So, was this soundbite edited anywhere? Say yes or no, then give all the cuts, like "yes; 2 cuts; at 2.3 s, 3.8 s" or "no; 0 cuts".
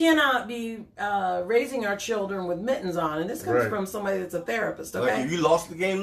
no; 0 cuts